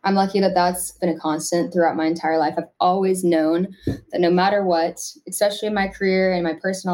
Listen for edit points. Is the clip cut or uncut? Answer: cut